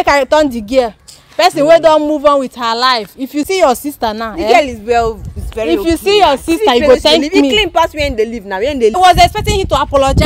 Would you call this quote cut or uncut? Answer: cut